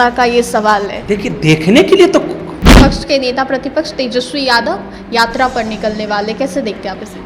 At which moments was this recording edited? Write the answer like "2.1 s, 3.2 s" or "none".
2.7 s